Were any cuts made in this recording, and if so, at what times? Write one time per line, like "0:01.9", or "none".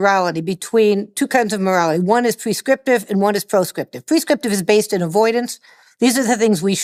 none